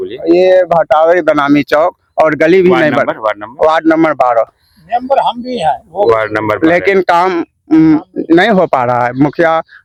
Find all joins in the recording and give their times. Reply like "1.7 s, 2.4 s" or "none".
none